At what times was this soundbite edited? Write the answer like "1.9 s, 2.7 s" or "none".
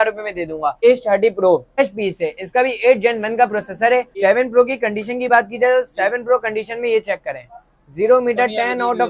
0.8 s, 1.8 s, 4.1 s